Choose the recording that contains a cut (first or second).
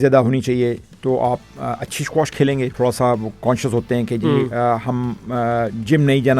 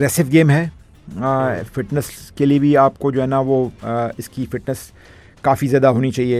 first